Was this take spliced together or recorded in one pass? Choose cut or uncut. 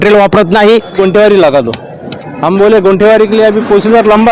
cut